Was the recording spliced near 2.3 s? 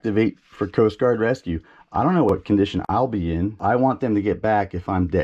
yes; 2 cuts; at 2.3 s, 3.6 s

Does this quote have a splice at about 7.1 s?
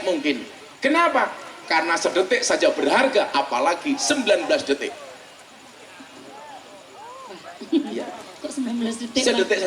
no; 0 cuts

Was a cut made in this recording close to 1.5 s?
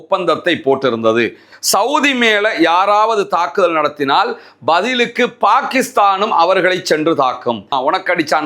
yes; 2 cuts; at 1.5 s, 7.7 s

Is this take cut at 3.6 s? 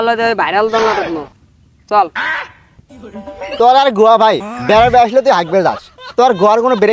yes; 1 cut; at 3.6 s

